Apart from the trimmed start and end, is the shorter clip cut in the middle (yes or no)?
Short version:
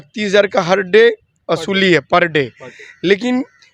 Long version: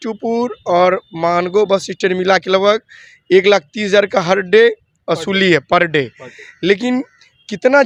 no